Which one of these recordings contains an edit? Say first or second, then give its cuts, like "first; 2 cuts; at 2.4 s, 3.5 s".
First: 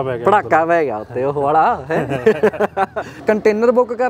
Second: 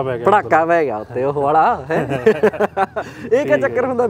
first; 1 cut; at 3.1 s